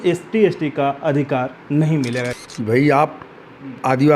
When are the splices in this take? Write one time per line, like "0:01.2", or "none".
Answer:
0:02.4